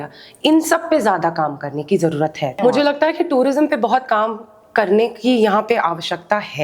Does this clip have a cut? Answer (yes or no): yes